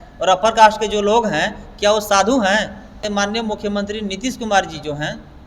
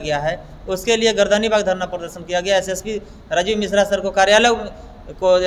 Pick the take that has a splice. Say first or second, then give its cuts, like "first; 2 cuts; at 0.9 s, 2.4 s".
first; 1 cut; at 3.0 s